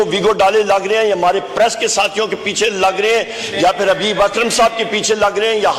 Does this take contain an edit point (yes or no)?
no